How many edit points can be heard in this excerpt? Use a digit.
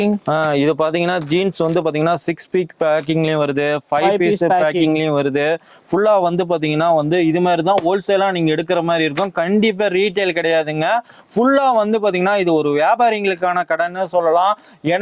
0